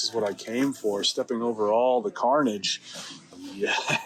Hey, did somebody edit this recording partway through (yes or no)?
no